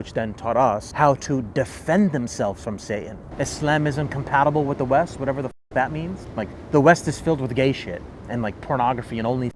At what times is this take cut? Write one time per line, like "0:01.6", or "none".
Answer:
0:00.9
0:03.2
0:06.2